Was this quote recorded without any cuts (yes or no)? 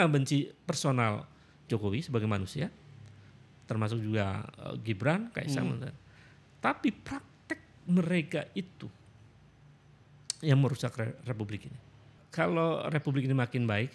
no